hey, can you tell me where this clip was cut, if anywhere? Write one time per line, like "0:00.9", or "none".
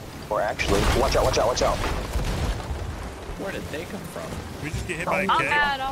none